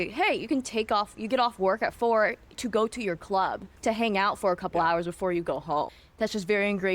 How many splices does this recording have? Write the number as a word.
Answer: two